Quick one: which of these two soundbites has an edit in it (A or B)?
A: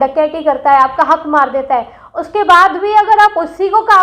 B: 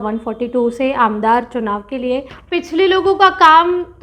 B